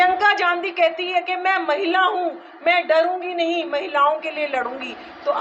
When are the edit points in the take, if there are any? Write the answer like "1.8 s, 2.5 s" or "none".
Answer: none